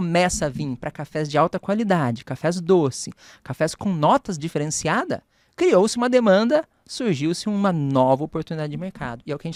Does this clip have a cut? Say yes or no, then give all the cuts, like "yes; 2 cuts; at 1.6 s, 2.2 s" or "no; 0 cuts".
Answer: no; 0 cuts